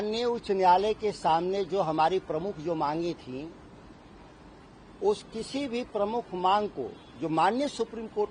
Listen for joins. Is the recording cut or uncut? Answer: uncut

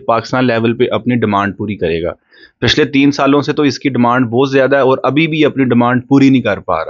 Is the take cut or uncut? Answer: uncut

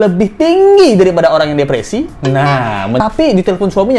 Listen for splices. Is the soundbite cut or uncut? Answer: cut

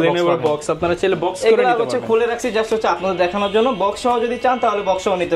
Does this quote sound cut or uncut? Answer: uncut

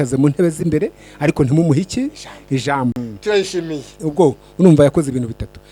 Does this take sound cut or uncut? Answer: cut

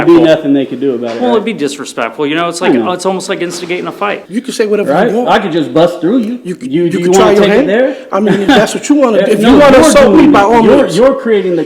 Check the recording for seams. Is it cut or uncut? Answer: cut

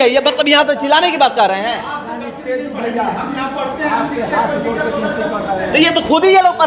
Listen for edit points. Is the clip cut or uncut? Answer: uncut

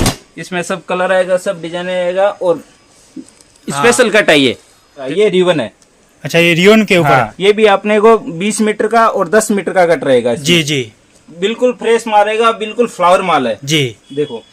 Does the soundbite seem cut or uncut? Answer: cut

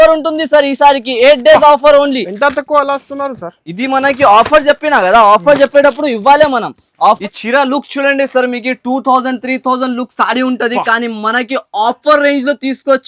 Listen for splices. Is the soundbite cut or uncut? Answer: cut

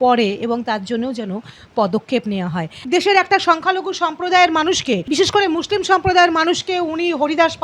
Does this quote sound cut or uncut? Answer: cut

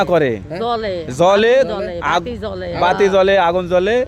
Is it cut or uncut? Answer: uncut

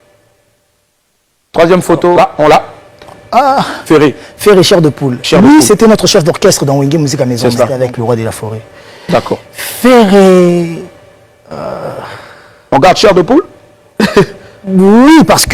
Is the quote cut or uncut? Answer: cut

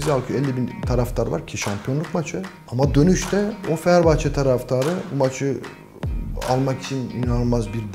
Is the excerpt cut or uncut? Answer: cut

